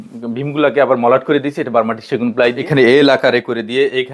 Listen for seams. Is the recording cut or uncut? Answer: cut